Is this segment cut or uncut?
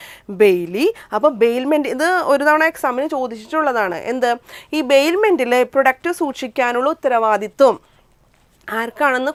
uncut